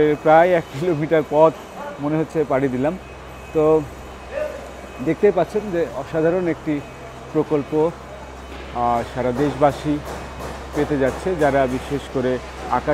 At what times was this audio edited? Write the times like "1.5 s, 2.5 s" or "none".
none